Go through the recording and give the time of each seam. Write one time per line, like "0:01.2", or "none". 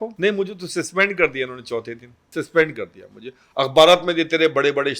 0:02.3